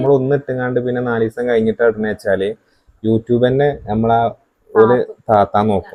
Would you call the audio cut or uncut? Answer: uncut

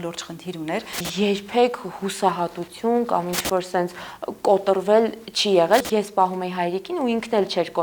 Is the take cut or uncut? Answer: cut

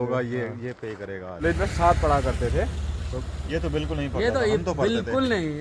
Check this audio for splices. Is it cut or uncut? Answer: cut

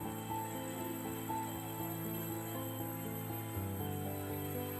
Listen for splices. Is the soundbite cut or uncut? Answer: uncut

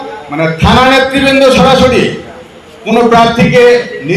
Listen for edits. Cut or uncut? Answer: uncut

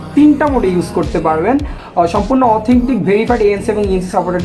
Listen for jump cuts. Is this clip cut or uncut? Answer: cut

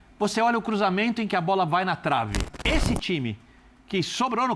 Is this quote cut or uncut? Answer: cut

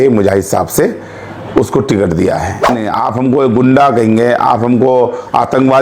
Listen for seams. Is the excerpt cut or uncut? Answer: cut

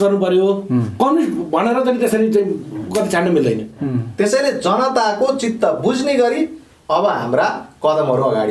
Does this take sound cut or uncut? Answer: cut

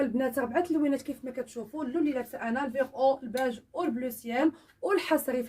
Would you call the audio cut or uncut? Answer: cut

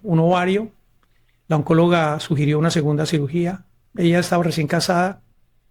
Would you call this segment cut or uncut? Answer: cut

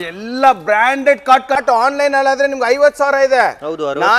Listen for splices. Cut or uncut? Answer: cut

